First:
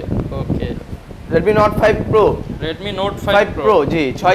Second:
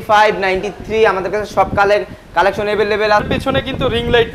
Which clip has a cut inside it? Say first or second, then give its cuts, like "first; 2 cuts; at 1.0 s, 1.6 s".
second; 1 cut; at 3.2 s